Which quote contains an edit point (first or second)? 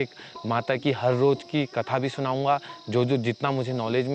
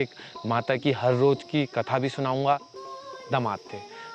second